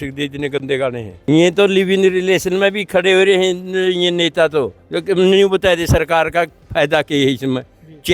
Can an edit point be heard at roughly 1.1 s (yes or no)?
yes